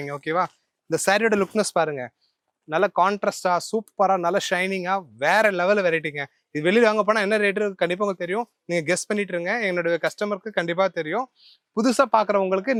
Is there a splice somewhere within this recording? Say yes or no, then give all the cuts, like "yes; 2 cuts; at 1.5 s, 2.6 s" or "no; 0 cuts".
no; 0 cuts